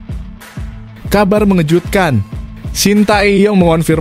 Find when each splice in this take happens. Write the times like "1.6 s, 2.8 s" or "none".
1.0 s